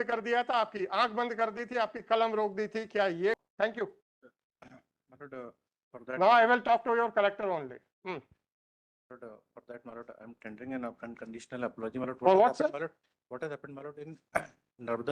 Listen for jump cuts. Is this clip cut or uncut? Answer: cut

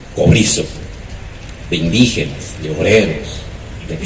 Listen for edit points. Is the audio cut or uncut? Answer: uncut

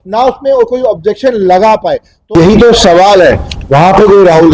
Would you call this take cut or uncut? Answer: cut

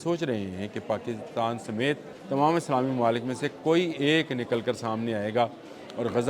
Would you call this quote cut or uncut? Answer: cut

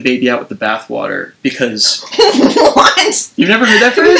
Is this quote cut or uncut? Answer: uncut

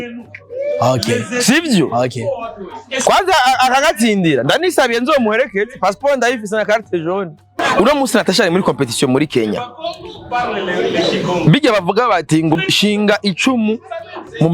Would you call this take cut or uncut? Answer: cut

